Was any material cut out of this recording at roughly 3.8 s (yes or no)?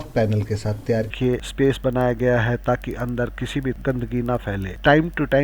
yes